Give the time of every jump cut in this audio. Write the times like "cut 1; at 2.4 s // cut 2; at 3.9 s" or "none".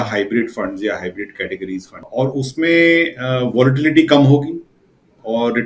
cut 1; at 2.0 s